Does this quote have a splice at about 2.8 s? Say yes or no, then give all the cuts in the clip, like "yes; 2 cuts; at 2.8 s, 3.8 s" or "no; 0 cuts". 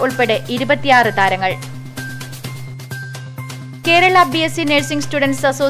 no; 0 cuts